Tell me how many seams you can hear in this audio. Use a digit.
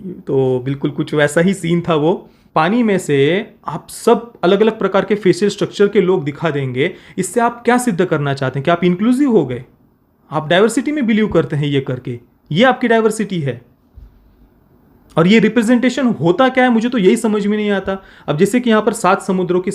1